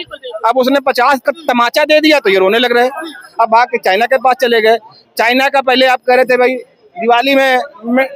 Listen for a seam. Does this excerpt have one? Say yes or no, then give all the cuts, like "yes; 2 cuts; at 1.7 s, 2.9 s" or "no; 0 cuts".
no; 0 cuts